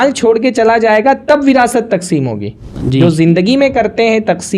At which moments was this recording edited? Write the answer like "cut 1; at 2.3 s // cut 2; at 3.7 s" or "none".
cut 1; at 2.7 s